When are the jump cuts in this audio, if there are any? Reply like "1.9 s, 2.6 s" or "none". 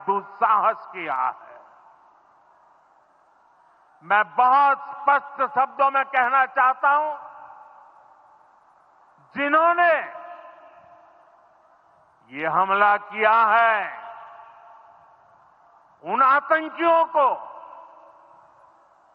17.1 s